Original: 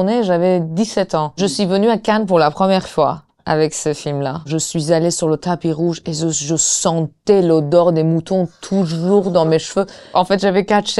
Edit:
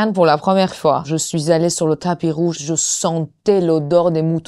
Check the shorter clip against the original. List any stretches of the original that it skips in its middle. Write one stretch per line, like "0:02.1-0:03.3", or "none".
0:03.2-0:04.5
0:06.0-0:06.4